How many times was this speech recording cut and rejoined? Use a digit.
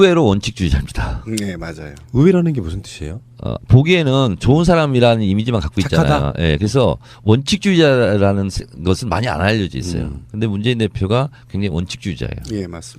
1